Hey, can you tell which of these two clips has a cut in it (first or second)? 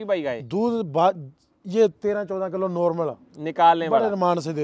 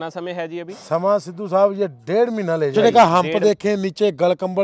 second